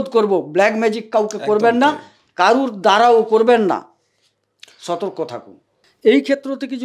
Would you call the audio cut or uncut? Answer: cut